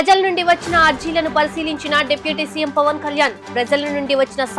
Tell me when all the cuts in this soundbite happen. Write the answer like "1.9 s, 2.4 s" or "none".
none

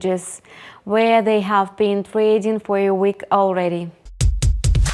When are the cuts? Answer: 4.0 s

